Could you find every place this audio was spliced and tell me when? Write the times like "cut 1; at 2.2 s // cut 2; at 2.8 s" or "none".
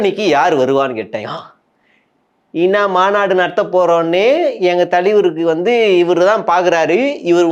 none